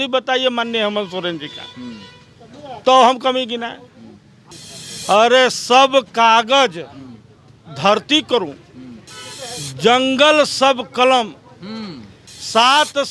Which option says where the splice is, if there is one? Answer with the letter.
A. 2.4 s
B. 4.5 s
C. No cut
B